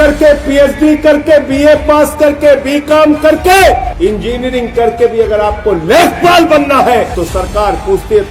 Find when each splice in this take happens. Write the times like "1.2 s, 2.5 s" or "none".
3.9 s, 7.1 s